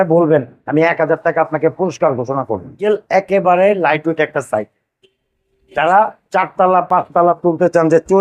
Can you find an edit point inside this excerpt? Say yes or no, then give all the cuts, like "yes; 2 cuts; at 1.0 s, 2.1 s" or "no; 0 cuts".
yes; 1 cut; at 2.8 s